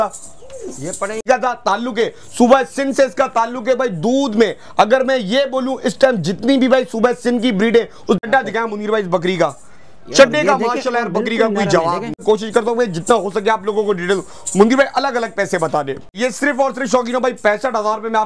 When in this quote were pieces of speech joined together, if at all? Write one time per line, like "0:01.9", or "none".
0:01.2
0:08.2
0:12.2
0:16.1